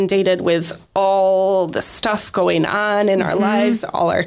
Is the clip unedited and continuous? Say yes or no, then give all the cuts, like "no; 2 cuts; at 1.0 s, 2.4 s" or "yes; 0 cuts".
yes; 0 cuts